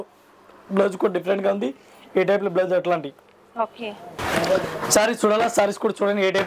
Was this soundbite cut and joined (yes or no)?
no